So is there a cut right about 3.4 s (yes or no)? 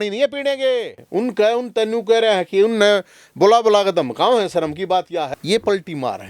no